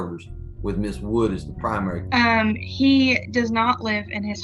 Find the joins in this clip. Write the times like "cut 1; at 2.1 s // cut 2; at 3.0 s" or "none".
cut 1; at 2.0 s